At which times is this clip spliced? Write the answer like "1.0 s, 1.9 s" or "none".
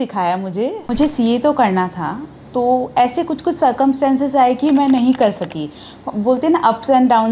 0.9 s